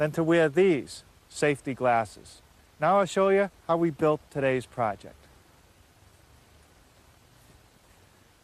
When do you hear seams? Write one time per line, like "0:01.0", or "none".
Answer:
0:01.4